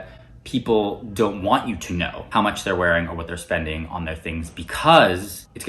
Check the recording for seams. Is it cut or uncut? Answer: cut